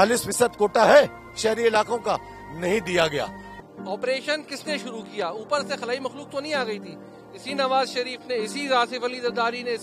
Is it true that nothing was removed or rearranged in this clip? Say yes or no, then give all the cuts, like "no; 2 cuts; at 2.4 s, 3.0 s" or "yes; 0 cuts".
no; 1 cut; at 3.4 s